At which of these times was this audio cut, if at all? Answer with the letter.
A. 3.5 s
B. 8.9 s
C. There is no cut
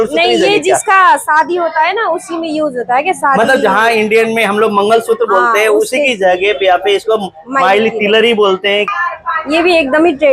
B